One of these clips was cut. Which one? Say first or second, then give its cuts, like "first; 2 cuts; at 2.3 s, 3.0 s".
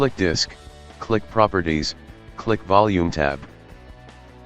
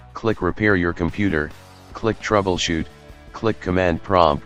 first; 1 cut; at 3.5 s